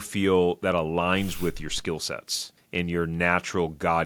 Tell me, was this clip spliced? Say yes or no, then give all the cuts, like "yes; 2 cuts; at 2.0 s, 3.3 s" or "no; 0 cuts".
no; 0 cuts